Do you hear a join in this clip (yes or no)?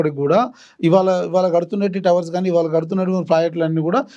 no